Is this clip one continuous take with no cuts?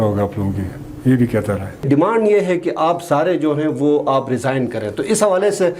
no; 1 cut; at 1.9 s

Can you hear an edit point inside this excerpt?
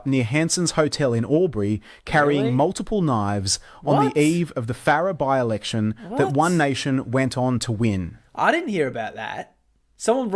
no; 0 cuts

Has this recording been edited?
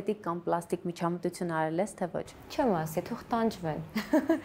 no; 0 cuts

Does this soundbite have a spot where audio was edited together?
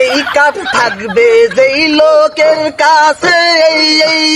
no; 0 cuts

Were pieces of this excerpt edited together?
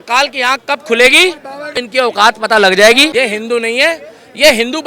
yes; 2 cuts; at 1.9 s, 3.3 s

